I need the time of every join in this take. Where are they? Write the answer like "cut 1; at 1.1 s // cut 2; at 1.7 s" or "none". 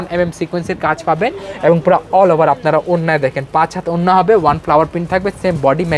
none